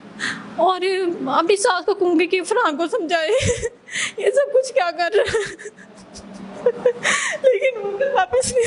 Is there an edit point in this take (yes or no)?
no